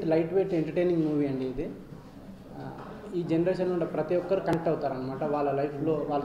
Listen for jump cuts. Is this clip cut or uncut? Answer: uncut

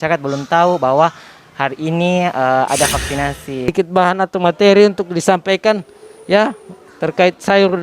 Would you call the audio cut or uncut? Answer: cut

